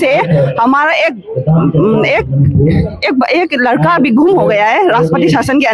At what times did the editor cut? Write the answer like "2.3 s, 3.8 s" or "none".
none